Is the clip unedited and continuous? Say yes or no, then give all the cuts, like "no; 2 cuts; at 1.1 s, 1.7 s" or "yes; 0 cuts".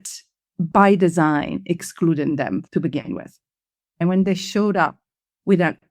no; 2 cuts; at 2.7 s, 4.0 s